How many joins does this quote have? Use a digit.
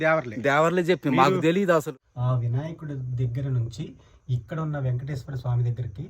1